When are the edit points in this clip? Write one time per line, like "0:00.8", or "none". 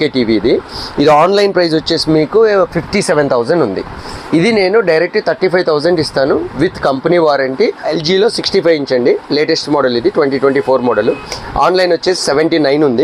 0:07.9